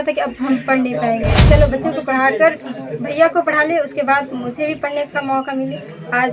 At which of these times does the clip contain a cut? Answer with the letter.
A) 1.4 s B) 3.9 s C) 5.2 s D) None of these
A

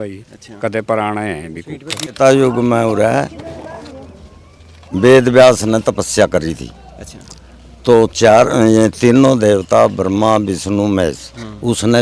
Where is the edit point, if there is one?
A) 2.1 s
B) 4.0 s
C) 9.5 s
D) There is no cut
A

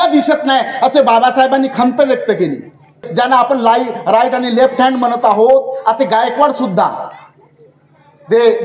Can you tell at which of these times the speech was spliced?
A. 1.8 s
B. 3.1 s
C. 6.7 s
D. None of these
B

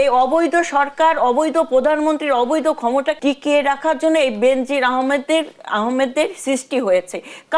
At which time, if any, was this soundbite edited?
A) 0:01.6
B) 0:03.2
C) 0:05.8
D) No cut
B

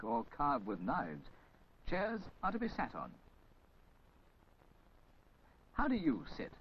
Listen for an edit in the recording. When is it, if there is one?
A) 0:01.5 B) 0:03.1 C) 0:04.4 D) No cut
C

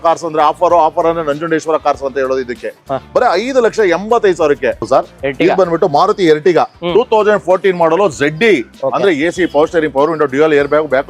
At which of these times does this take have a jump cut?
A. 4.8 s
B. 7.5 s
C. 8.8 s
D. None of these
A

